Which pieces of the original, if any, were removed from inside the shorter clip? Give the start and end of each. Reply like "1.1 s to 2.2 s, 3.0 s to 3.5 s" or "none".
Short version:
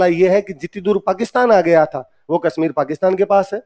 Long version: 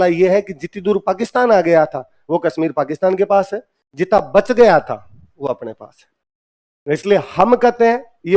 none